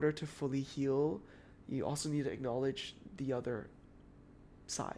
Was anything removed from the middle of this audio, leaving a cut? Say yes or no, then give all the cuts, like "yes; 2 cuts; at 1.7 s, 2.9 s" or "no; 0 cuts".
no; 0 cuts